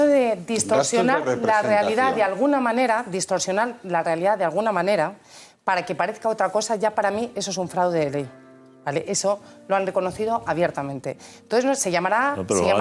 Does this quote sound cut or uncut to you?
cut